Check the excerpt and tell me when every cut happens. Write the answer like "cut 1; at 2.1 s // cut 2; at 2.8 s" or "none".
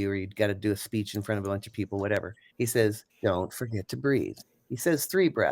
cut 1; at 2.4 s // cut 2; at 3.1 s // cut 3; at 4.4 s